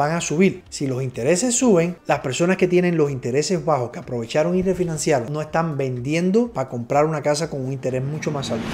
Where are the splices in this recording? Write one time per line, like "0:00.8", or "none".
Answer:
0:02.0